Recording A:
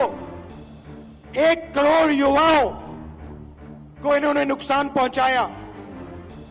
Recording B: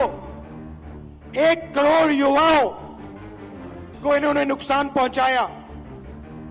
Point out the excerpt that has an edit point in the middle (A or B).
A